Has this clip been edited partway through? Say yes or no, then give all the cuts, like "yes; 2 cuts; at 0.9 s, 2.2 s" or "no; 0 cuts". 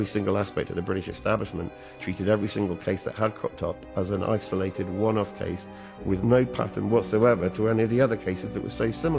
no; 0 cuts